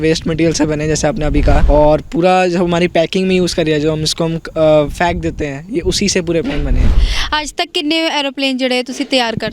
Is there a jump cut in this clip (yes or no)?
yes